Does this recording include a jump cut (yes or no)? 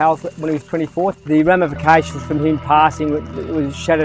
yes